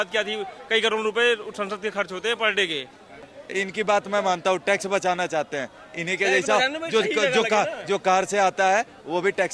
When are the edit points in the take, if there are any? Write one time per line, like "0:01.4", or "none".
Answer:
0:03.4